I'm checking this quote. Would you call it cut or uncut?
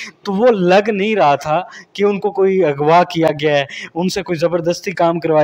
uncut